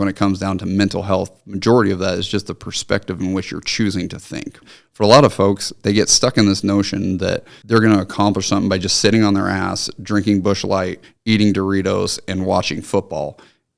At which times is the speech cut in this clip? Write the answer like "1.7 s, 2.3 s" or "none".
4.6 s, 7.5 s